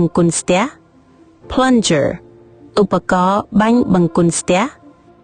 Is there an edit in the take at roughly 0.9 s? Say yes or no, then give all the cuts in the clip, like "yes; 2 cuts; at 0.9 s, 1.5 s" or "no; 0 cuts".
no; 0 cuts